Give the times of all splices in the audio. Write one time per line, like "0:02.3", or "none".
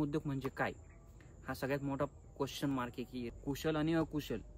0:03.3